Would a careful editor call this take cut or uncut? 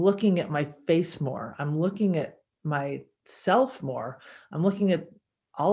uncut